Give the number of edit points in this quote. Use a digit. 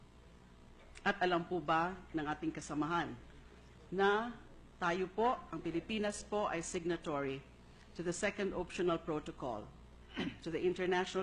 0